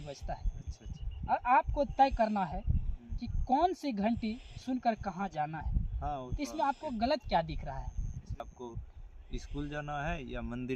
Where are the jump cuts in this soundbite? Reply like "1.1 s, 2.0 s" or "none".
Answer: 8.4 s